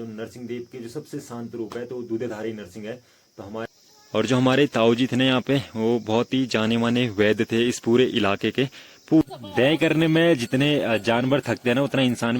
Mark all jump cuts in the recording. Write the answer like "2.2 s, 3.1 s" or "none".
3.7 s, 9.2 s